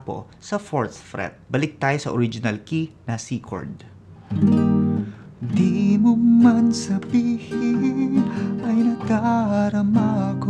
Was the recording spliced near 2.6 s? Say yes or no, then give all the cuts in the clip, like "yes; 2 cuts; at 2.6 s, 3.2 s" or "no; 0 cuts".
no; 1 cut; at 1.4 s